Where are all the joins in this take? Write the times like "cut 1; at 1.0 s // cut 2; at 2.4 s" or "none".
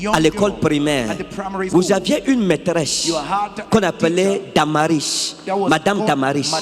cut 1; at 1.7 s